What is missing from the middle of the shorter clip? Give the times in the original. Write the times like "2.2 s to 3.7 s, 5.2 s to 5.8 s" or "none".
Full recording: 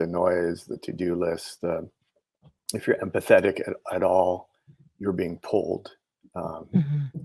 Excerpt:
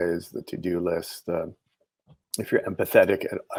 none